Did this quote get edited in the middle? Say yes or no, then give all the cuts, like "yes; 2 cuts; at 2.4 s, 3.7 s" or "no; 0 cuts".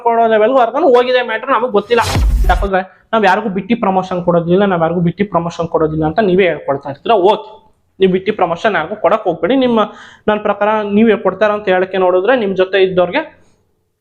yes; 1 cut; at 2.4 s